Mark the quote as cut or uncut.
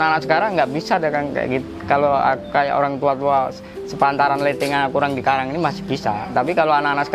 uncut